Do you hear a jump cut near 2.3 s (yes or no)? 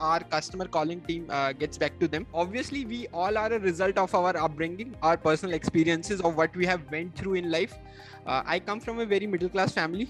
yes